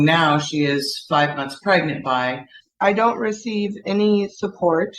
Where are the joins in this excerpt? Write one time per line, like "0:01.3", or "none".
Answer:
0:02.6